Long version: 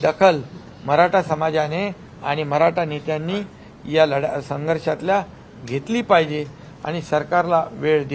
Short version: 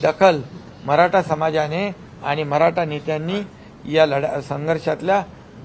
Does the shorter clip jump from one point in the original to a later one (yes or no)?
no